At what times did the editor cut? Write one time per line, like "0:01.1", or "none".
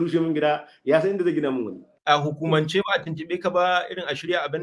0:01.9